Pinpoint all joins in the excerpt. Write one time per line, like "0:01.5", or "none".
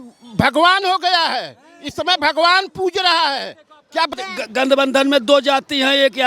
0:04.1